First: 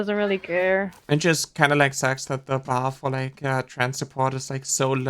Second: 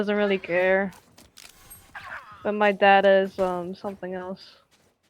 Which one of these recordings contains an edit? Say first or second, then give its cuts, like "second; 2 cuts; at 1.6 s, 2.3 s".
first; 1 cut; at 1.0 s